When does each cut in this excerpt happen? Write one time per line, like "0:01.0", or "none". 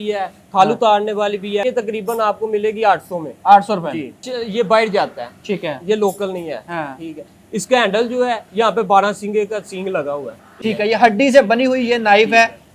0:01.6
0:04.2
0:10.4

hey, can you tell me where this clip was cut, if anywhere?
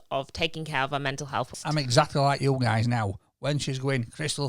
0:01.5

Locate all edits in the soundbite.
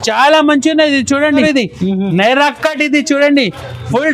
0:01.4

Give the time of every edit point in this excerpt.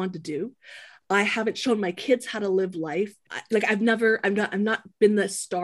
0:03.3

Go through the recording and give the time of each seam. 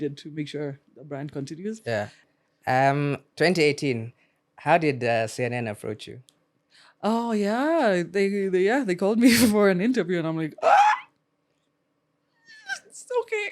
0:02.2

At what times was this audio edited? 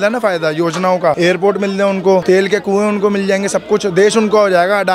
0:01.2
0:02.2

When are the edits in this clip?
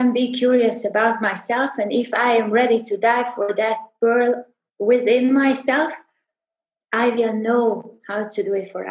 none

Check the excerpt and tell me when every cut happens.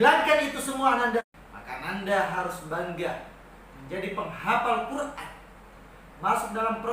0:01.2

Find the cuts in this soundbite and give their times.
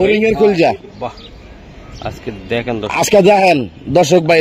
none

